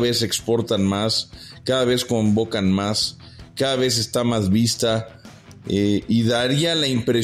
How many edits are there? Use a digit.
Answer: 0